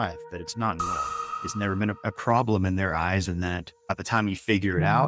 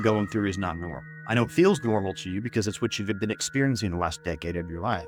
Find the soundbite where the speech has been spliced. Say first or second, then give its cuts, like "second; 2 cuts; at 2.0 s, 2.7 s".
first; 2 cuts; at 1.3 s, 3.7 s